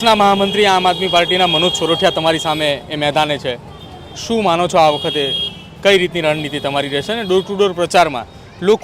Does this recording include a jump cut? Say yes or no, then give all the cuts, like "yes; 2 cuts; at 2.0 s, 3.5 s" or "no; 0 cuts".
no; 0 cuts